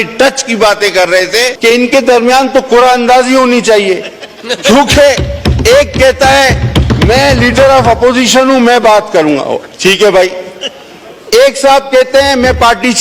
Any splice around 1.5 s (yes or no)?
yes